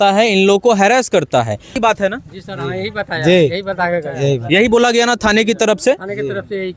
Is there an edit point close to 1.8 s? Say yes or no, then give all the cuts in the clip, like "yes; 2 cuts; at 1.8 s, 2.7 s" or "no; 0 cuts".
yes; 1 cut; at 1.8 s